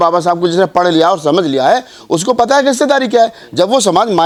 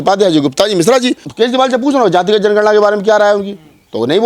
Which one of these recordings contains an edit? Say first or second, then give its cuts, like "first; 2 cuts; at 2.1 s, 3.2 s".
second; 1 cut; at 1.3 s